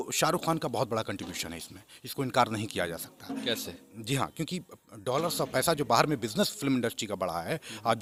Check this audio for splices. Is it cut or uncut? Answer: uncut